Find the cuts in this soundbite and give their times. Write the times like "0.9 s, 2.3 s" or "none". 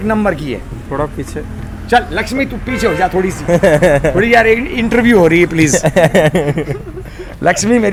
none